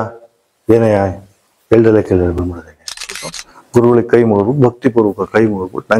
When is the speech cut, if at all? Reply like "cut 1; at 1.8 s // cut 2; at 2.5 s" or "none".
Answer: cut 1; at 3.3 s